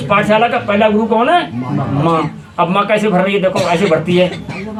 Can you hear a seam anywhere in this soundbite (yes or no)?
no